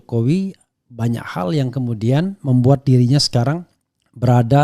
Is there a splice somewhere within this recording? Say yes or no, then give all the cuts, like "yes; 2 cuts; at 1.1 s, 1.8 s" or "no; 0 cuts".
no; 0 cuts